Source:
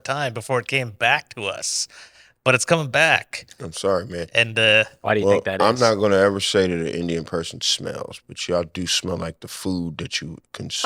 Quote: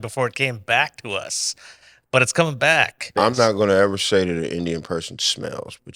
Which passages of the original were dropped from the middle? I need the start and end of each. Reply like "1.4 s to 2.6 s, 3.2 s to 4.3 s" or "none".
3.4 s to 5.5 s